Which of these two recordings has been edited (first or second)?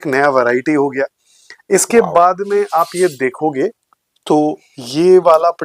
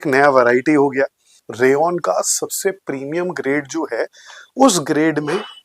second